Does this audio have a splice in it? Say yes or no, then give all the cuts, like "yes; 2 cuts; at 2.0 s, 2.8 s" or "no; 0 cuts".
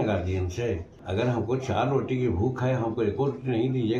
yes; 1 cut; at 0.9 s